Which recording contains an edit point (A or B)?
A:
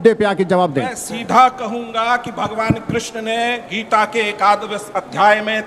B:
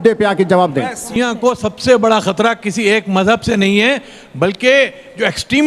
B